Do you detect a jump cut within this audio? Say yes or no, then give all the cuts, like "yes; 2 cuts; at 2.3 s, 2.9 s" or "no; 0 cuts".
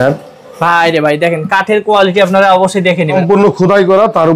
yes; 1 cut; at 3.2 s